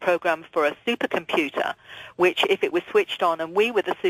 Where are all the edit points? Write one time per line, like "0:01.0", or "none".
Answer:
0:02.5